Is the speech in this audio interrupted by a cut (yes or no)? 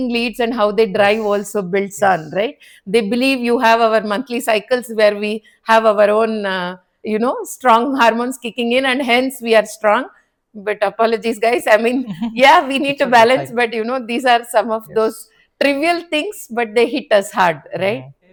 no